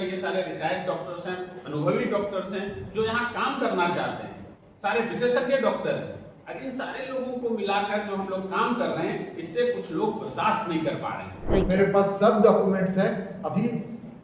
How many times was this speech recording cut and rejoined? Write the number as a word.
one